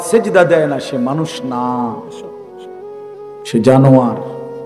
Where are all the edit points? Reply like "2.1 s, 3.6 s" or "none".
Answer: 2.0 s, 3.5 s